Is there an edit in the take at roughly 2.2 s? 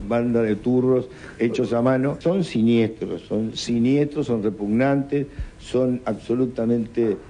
yes; 1 cut; at 2.2 s

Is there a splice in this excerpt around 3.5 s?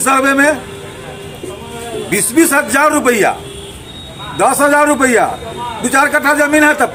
no; 0 cuts

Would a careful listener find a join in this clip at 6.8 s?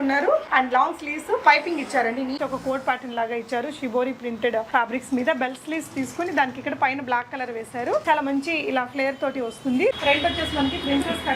no; 4 cuts; at 2.4 s, 4.7 s, 8.0 s, 10.0 s

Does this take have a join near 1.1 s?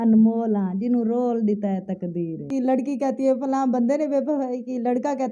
no; 1 cut; at 2.5 s

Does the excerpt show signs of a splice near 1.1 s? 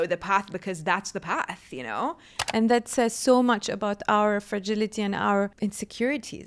no; 2 cuts; at 2.4 s, 5.5 s

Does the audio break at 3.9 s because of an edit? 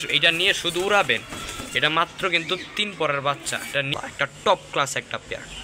yes; 1 cut; at 3.9 s

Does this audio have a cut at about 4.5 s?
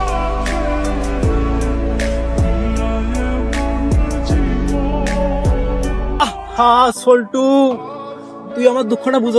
no; 2 cuts; at 3.1 s, 6.0 s

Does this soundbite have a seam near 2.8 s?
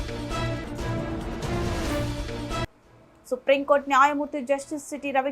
yes; 1 cut; at 2.8 s

